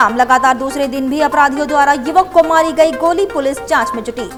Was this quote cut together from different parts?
no; 0 cuts

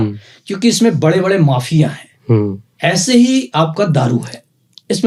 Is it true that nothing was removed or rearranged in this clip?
yes; 0 cuts

